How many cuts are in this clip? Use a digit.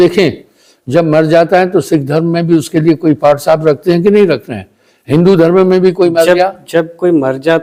0